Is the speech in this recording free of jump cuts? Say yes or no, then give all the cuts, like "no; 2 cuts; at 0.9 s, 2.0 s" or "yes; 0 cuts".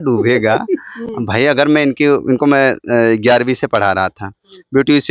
yes; 0 cuts